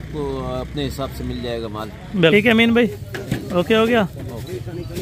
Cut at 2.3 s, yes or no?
yes